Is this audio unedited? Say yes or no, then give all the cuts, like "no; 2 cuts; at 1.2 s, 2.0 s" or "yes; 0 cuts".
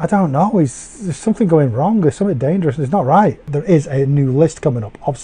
no; 1 cut; at 3.5 s